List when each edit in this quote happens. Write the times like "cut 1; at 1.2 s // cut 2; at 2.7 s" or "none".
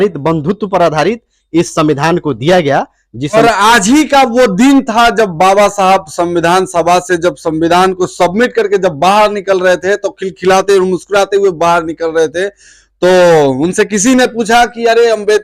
cut 1; at 3.4 s